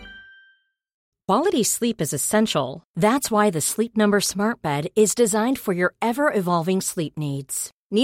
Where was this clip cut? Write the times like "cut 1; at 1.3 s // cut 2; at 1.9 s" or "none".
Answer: cut 1; at 1.1 s